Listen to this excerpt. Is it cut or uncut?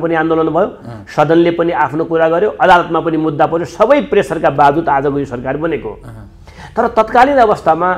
uncut